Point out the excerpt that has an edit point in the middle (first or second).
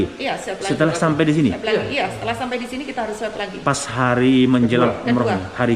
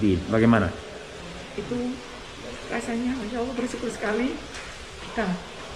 second